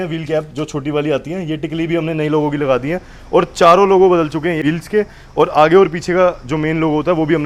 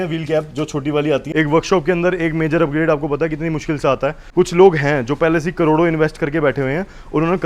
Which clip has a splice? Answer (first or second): second